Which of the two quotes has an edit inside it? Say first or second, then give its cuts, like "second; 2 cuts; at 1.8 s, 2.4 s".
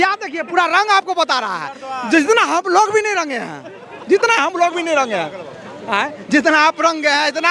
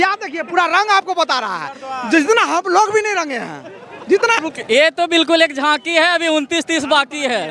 second; 1 cut; at 4.4 s